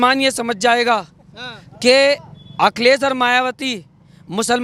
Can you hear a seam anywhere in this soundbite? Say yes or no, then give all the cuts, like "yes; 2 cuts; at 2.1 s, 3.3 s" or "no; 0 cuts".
no; 0 cuts